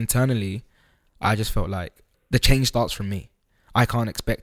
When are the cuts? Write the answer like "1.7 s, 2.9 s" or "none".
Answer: 2.1 s